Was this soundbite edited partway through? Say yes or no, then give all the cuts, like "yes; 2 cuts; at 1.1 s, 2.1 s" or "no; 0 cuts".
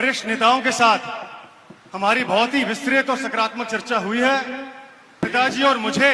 yes; 1 cut; at 5.2 s